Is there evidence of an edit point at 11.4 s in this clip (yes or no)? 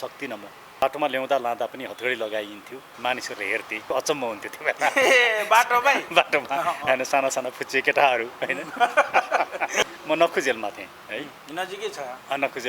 yes